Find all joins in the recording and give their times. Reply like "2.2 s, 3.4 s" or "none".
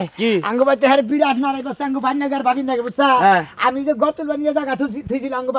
none